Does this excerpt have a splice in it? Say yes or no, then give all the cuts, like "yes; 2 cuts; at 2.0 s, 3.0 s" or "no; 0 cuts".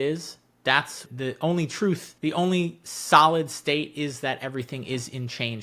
yes; 1 cut; at 2.1 s